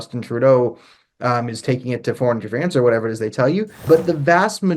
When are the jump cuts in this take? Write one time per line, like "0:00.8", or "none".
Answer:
0:03.9